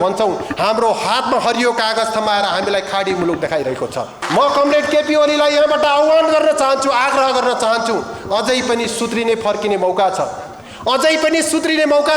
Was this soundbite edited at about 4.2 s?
yes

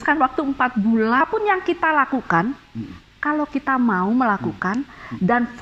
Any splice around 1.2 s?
yes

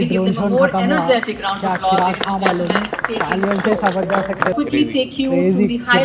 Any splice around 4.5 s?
yes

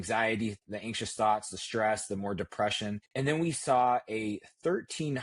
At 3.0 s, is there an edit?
yes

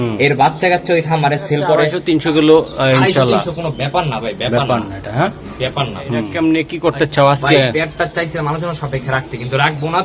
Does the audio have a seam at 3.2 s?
no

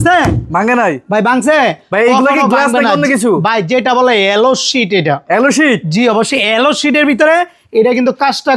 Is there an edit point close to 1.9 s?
no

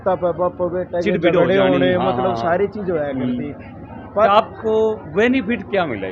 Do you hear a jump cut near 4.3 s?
yes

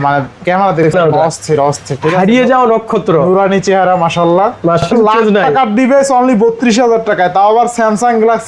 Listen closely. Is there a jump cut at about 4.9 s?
yes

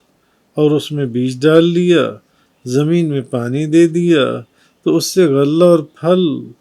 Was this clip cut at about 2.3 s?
no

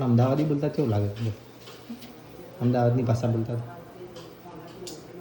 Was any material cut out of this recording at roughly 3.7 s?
no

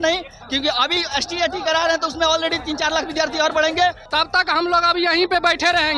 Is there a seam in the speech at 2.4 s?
no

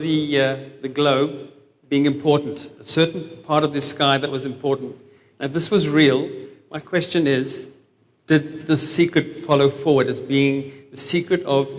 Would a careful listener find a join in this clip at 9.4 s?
no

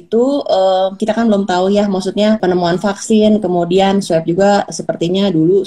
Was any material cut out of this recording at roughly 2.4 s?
yes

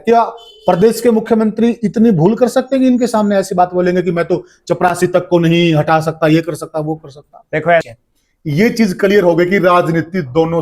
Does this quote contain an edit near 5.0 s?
no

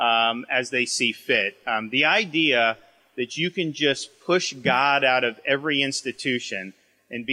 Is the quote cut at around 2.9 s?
no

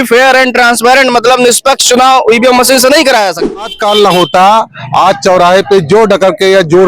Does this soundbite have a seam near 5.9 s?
no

